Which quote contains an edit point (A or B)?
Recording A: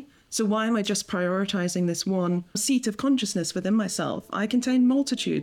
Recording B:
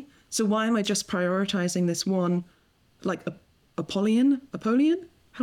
A